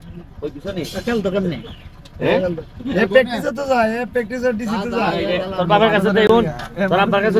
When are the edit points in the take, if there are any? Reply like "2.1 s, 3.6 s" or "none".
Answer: none